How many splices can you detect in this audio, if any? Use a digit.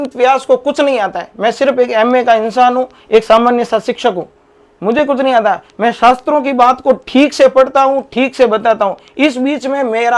0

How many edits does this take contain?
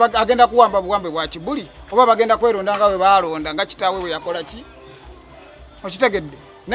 0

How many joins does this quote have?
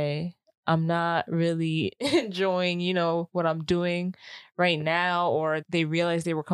1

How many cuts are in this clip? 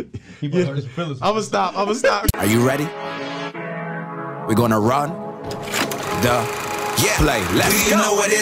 1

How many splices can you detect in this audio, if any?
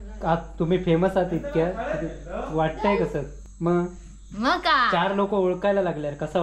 1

